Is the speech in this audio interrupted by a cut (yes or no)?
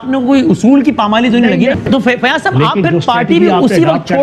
yes